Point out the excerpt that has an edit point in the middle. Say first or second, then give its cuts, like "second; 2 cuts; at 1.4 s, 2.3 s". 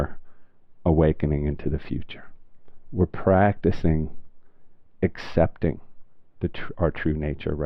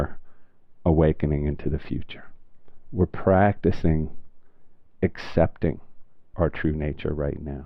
second; 1 cut; at 6.2 s